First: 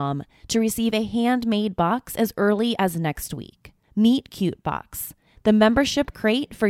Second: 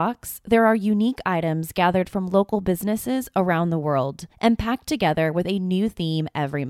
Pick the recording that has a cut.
second; 1 cut; at 4.2 s

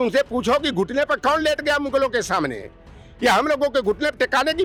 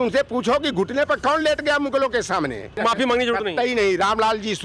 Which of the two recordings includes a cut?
second; 1 cut; at 2.8 s

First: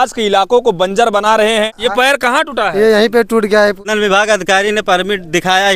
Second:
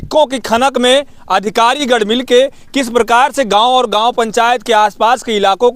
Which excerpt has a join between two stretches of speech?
first; 2 cuts; at 1.8 s, 3.9 s

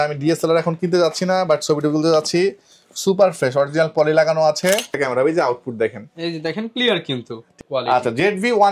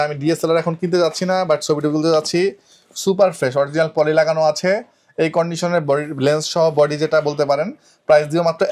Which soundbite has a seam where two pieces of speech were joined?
first; 2 cuts; at 4.9 s, 7.5 s

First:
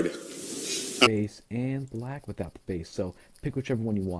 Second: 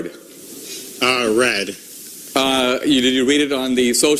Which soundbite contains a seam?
second; 1 cut; at 1.1 s

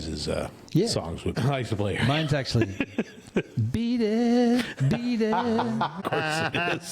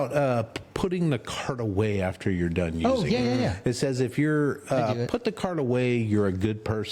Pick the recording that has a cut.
first; 2 cuts; at 1.4 s, 6.0 s

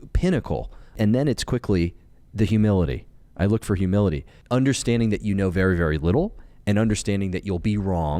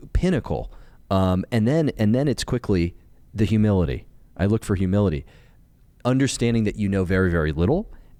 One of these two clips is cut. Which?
first; 2 cuts; at 1.0 s, 4.3 s

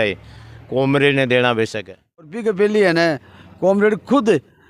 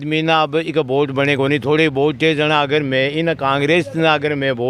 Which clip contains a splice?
first; 1 cut; at 2.3 s

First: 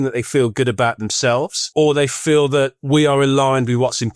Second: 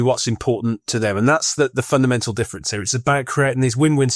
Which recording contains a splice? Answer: first; 2 cuts; at 1.6 s, 2.8 s

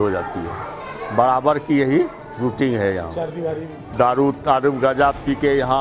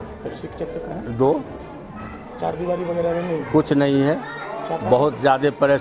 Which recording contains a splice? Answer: first; 1 cut; at 3.8 s

